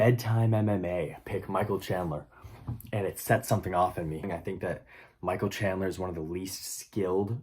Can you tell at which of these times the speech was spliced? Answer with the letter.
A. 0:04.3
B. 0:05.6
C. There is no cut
A